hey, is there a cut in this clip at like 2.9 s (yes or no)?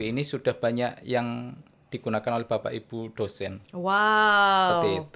no